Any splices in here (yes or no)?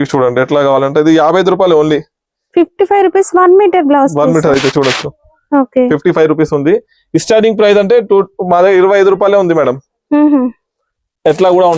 no